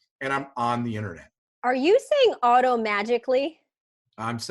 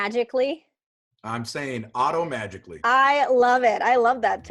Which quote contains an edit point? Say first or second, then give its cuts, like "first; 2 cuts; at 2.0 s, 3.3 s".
first; 1 cut; at 1.7 s